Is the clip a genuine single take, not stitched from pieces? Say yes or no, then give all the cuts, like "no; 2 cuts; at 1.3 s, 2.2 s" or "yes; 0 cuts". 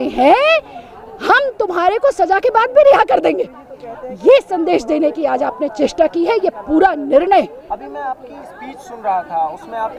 yes; 0 cuts